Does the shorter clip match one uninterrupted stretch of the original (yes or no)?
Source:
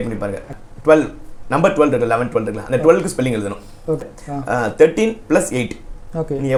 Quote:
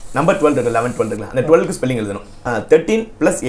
no